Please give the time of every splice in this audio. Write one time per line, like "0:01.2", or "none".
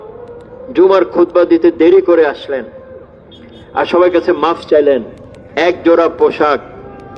none